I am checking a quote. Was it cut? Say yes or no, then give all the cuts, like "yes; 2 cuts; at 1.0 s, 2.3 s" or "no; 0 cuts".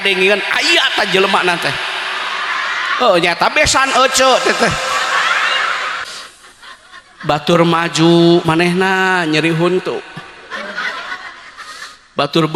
yes; 1 cut; at 6.0 s